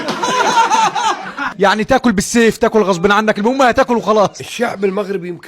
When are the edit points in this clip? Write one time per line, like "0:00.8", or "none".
0:01.5
0:04.4